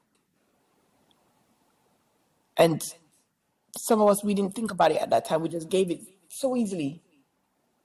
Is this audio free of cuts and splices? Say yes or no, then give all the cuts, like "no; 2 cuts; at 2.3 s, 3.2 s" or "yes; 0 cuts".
yes; 0 cuts